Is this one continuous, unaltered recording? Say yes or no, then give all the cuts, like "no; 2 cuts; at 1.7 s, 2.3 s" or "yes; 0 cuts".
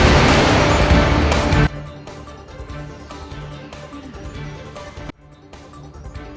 no; 1 cut; at 1.5 s